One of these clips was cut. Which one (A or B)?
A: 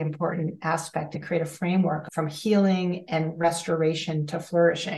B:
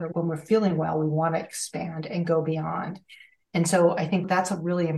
A